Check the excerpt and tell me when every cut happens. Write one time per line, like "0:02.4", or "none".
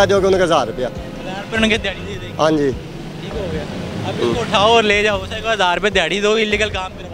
none